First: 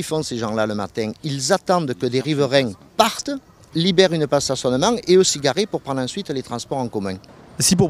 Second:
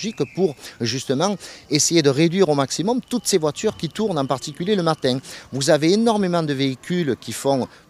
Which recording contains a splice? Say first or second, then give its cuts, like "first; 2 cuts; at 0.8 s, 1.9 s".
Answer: first; 1 cut; at 6.6 s